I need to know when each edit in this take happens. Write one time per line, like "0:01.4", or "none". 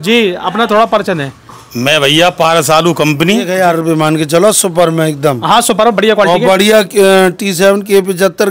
0:03.5